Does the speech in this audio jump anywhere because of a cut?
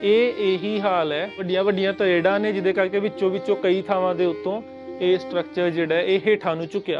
no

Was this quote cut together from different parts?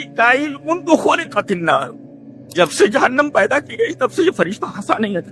no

